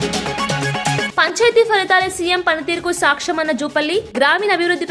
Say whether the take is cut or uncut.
cut